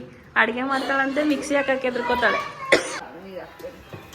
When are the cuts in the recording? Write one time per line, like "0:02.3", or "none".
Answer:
0:03.0